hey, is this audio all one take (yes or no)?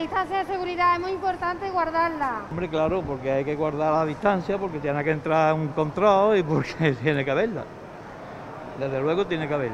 yes